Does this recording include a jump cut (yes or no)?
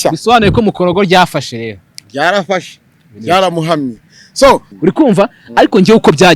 yes